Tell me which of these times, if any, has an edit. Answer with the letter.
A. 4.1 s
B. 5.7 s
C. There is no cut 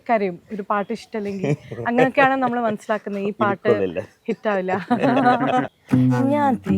B